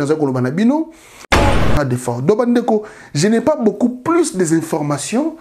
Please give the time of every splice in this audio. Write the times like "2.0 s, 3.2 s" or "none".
1.5 s

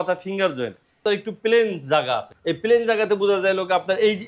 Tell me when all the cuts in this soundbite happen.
1.0 s, 2.3 s

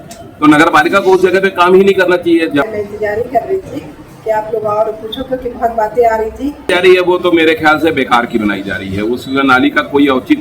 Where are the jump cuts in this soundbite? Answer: 2.7 s, 6.7 s

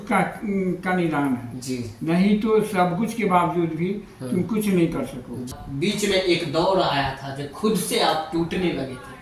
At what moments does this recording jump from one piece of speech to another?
5.6 s

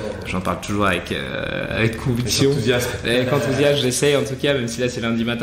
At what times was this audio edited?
none

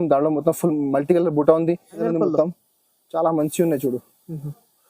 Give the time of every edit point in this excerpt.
2.0 s

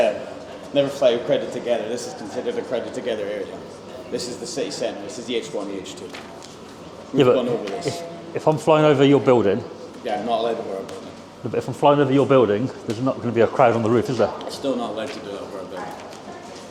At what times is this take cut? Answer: none

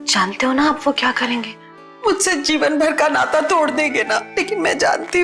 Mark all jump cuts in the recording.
4.3 s

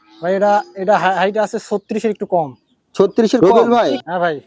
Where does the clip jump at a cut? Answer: 3.4 s

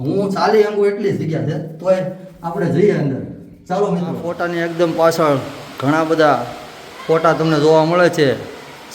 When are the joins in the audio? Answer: 4.3 s

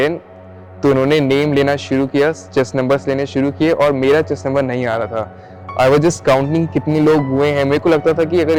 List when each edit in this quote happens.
none

